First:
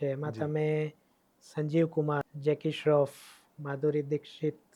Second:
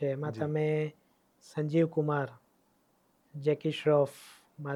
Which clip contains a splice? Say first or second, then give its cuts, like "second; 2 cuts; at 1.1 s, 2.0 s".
first; 1 cut; at 2.3 s